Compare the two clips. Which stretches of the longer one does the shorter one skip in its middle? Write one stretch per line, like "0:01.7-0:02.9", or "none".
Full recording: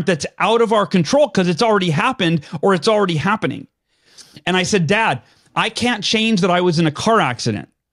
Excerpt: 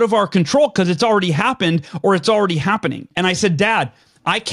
0:03.6-0:04.3